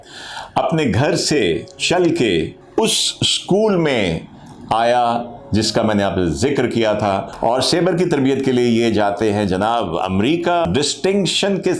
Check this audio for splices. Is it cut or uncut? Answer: cut